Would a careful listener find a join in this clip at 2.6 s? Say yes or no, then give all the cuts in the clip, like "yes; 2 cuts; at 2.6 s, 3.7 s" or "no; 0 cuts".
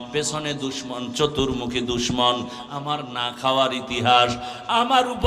yes; 1 cut; at 2.6 s